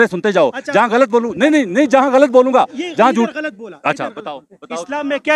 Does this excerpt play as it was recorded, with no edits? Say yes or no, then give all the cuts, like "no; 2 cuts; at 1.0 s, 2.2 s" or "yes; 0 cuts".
yes; 0 cuts